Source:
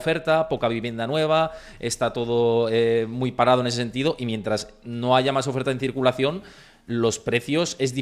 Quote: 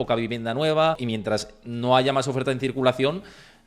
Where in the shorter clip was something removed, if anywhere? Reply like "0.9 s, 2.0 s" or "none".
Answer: 1.0 s